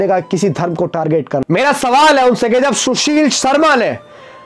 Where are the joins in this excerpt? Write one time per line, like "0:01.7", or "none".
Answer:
none